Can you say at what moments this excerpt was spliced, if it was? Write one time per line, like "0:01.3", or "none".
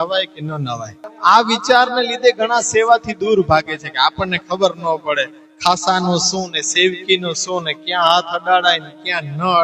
0:01.0